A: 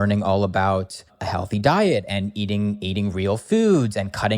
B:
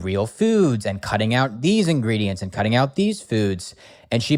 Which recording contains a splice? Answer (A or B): A